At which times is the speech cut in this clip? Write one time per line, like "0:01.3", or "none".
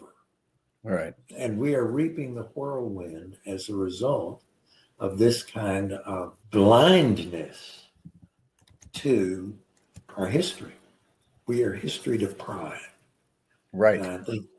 0:01.2
0:06.3
0:10.1